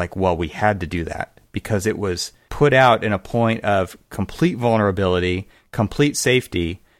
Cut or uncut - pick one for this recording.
cut